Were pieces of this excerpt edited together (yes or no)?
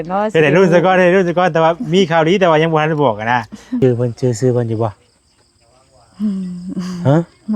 yes